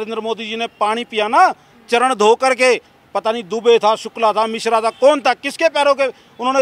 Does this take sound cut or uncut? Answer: uncut